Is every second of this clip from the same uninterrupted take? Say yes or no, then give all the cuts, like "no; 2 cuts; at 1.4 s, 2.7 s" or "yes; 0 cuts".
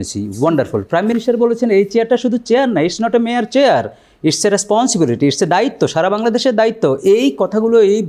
yes; 0 cuts